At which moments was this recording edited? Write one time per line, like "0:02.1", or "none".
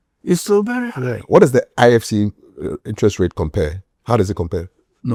none